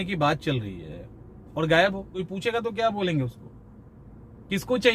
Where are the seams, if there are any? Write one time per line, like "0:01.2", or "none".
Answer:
0:02.2